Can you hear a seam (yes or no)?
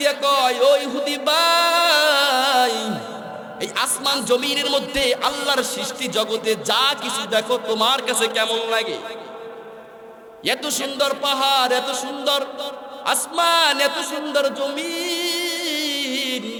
no